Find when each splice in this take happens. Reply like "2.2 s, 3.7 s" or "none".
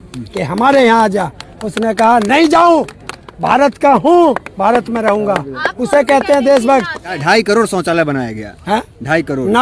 7.2 s

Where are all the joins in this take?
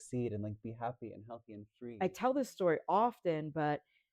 1.8 s

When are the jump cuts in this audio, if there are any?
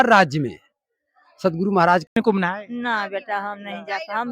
2.1 s

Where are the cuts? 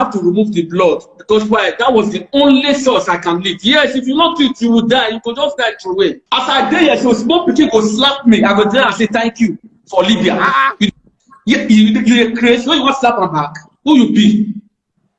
6.2 s

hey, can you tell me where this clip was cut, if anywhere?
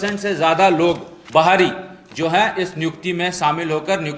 1.1 s

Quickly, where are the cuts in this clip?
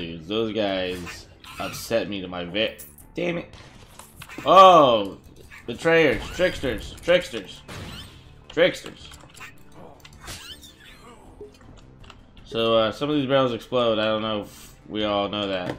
none

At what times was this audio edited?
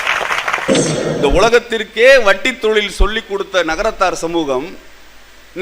1.0 s

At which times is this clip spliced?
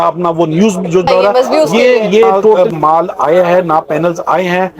1.1 s, 2.6 s

